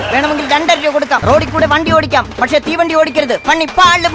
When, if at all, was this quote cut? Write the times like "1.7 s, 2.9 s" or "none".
1.2 s